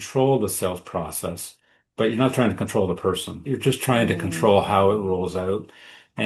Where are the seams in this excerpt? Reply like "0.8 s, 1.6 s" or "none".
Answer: 3.4 s